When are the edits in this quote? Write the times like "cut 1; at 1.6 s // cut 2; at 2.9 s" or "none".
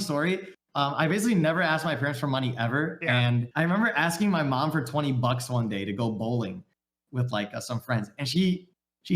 cut 1; at 3.5 s